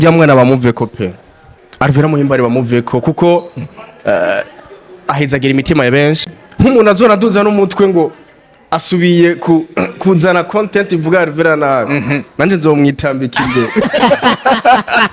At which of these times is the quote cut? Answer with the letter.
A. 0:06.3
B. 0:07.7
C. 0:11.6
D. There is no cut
A